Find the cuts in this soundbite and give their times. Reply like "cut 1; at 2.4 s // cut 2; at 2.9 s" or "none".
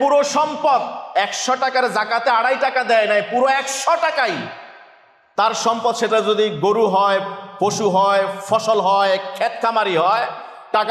none